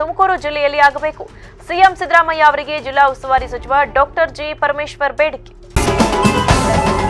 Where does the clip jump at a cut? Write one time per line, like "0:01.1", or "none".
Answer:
0:05.6